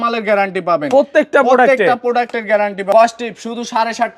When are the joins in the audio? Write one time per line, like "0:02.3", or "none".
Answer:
0:02.9